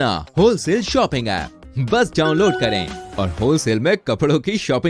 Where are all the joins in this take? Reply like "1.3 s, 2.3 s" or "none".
none